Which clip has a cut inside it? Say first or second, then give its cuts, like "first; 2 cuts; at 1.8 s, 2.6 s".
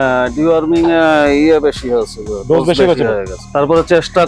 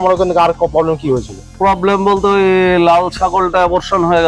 second; 1 cut; at 1.4 s